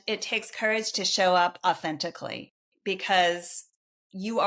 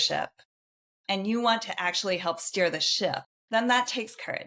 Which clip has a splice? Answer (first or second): second